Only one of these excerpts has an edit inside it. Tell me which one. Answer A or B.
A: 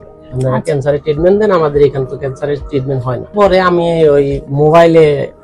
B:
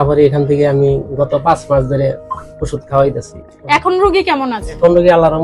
A